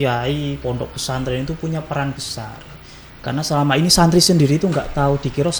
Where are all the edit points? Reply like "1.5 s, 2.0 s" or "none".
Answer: none